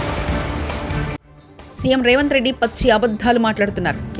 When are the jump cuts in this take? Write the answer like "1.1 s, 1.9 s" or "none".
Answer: 1.0 s